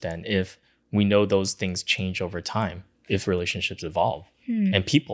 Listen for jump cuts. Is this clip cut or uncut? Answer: uncut